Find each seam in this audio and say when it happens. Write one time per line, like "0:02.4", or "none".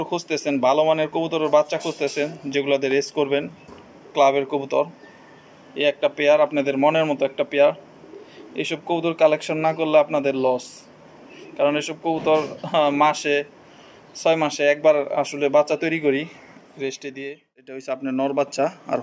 0:17.9